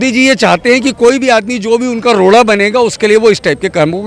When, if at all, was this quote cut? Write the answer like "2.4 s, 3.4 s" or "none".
none